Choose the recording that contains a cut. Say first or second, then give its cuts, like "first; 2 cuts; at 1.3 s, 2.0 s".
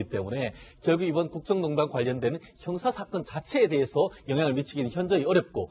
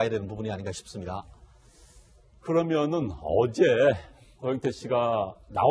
first; 1 cut; at 4.2 s